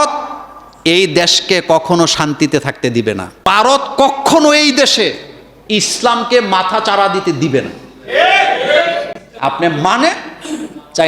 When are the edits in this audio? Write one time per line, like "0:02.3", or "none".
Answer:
0:03.5

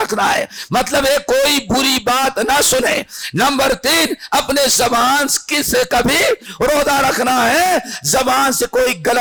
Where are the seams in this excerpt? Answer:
none

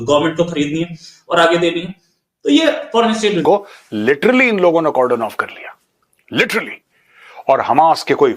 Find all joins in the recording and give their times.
0:03.4

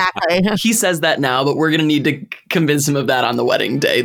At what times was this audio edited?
none

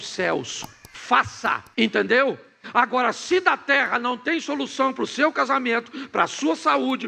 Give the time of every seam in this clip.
0:01.7

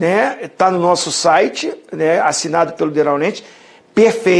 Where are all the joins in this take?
none

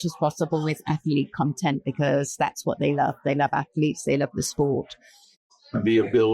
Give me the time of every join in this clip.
0:05.4

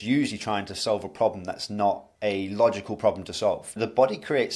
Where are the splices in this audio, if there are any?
0:02.1
0:03.7

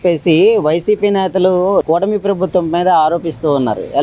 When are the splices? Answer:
0:01.9

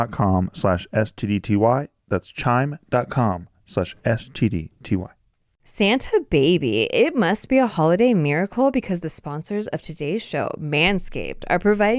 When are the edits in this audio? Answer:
0:05.3

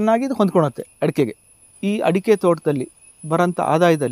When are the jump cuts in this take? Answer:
0:01.8

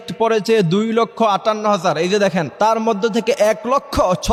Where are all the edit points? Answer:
none

